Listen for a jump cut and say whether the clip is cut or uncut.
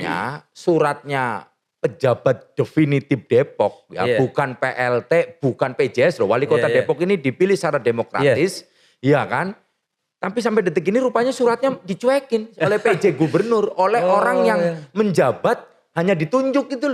uncut